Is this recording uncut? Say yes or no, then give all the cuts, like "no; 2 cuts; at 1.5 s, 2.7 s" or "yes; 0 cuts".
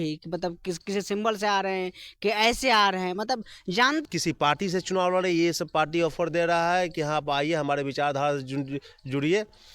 no; 1 cut; at 4.0 s